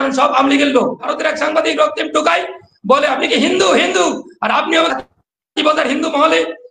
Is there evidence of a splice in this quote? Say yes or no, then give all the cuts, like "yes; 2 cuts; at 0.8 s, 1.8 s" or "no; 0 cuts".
yes; 1 cut; at 1.1 s